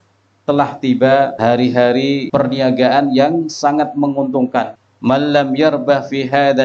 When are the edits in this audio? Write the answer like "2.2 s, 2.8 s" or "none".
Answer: 1.3 s, 2.3 s, 4.8 s